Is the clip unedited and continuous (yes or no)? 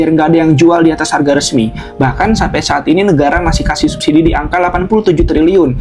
yes